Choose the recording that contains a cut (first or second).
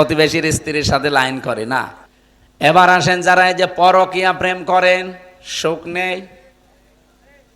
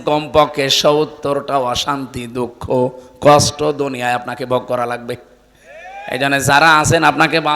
first